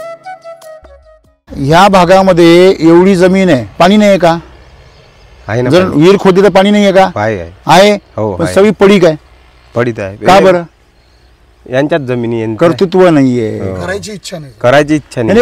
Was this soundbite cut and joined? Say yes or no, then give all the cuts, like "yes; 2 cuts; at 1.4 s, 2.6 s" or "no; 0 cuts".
yes; 1 cut; at 1.4 s